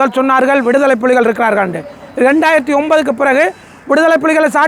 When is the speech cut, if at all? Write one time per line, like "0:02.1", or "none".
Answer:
none